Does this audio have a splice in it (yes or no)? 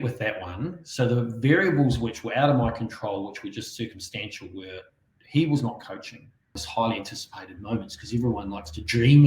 yes